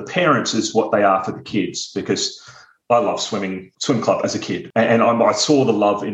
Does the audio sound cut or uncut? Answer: cut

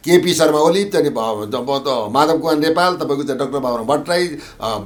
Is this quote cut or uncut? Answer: uncut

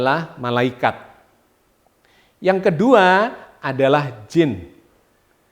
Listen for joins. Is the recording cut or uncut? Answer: uncut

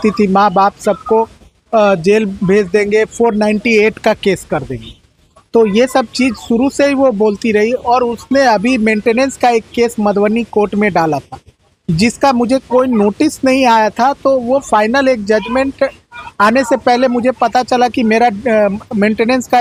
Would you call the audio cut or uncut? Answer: uncut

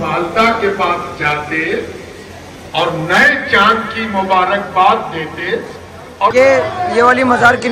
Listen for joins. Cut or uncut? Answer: cut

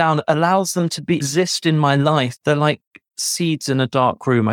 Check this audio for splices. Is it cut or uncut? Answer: cut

